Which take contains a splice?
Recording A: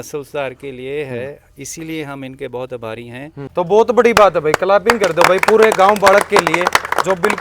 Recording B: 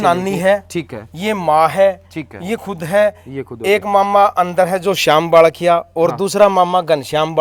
A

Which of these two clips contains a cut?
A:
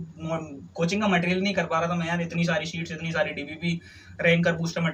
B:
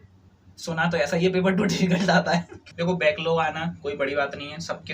B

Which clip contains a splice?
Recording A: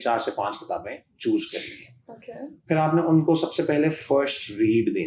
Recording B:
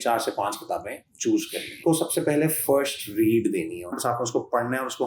B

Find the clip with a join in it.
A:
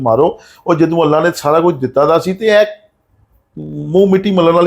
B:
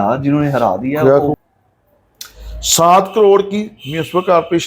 B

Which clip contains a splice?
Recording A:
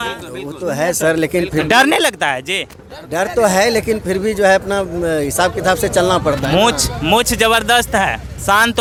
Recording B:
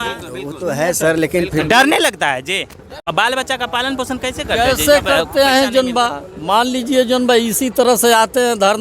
B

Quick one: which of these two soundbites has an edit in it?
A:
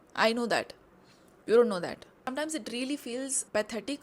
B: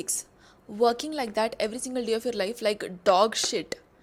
A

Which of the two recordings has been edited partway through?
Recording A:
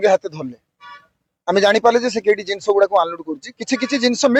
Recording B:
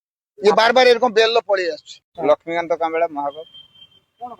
B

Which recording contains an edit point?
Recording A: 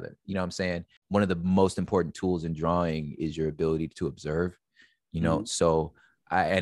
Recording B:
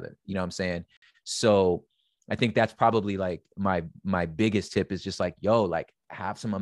A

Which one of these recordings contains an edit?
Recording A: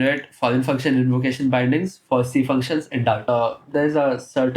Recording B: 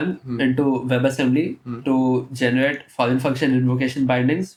A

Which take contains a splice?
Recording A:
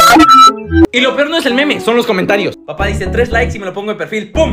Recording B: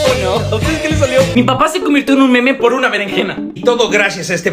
B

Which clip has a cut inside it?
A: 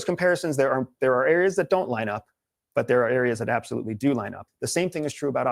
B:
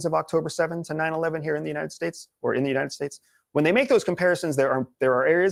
A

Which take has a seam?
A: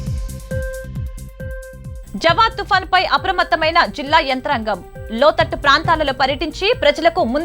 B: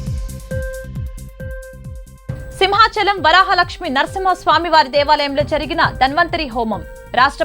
B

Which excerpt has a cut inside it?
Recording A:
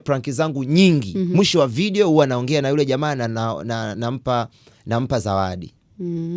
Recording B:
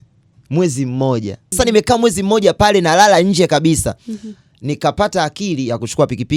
B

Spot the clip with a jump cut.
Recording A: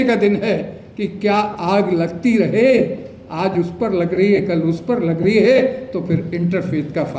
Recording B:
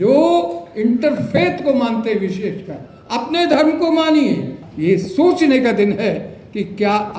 B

